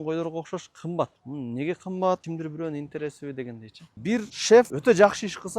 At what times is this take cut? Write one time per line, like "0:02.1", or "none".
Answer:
0:01.2
0:02.2
0:04.0

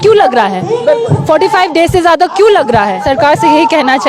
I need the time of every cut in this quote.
0:03.0

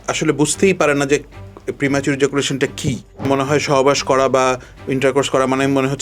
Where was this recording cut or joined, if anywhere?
0:03.3

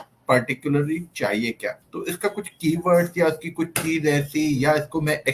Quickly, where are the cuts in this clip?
0:01.9

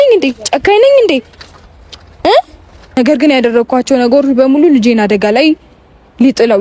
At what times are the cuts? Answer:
0:02.9

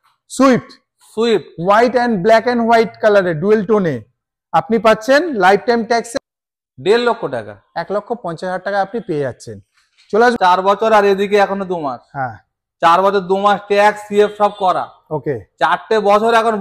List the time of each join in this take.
0:06.1
0:10.3

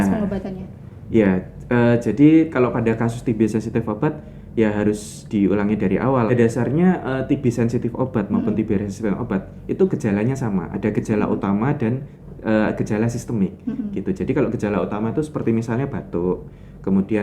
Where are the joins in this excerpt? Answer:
0:06.3

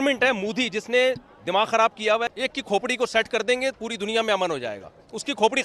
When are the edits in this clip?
0:02.3

